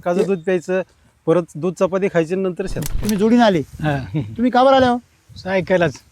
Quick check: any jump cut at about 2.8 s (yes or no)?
yes